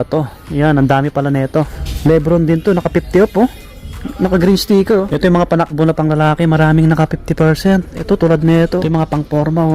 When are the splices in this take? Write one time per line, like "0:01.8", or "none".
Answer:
0:01.8
0:05.1
0:08.8